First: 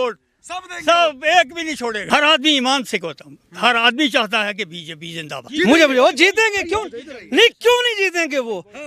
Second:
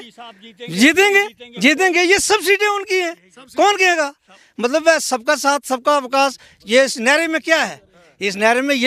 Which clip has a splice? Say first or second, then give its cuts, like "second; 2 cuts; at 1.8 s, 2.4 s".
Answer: first; 2 cuts; at 2.0 s, 5.5 s